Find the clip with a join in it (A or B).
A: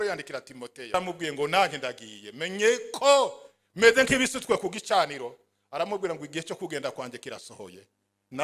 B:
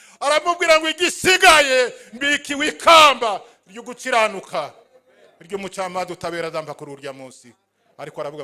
A